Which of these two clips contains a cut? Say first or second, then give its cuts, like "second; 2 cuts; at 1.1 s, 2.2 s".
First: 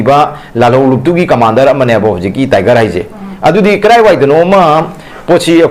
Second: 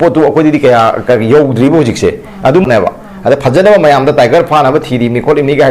second; 1 cut; at 2.7 s